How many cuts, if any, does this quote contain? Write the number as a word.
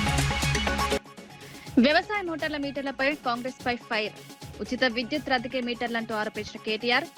one